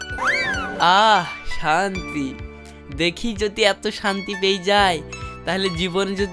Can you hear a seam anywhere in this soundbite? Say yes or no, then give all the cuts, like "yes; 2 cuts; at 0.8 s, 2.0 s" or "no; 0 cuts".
no; 0 cuts